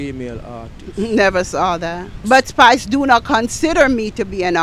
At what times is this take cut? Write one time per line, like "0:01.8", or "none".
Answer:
0:02.1